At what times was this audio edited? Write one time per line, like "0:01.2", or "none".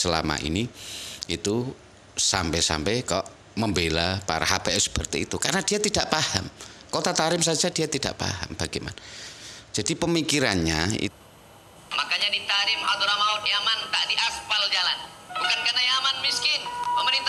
0:11.1

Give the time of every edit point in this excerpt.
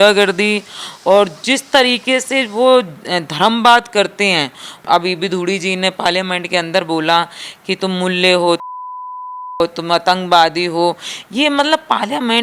0:04.8

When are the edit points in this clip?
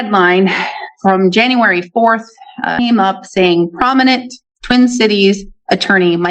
0:02.7

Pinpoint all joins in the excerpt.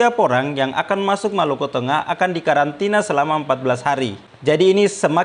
0:04.3

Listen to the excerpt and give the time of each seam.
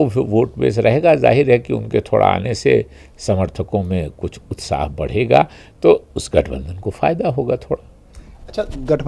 none

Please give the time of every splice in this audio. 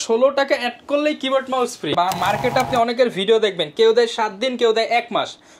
0:01.9

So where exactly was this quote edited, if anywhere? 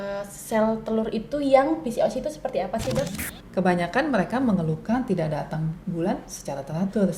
0:03.1

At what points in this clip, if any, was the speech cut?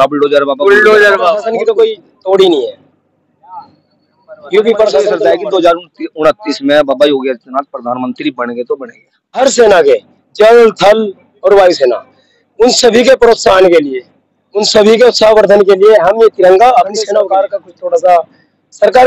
0:01.5
0:05.2
0:09.4
0:17.2

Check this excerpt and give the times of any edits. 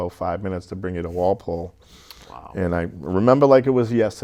none

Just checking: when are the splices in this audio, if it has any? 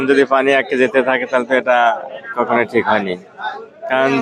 none

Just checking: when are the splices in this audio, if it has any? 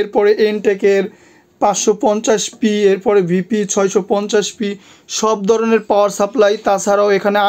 none

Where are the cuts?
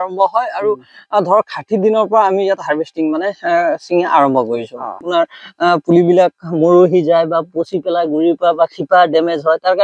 0:05.0

